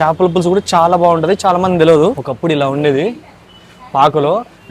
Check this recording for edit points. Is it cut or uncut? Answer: cut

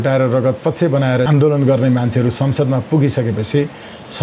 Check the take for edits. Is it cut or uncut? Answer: cut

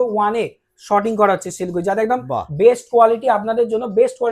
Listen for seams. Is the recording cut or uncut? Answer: uncut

